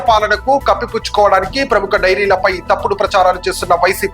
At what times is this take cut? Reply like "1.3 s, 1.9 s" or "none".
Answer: none